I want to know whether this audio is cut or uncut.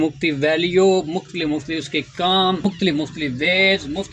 cut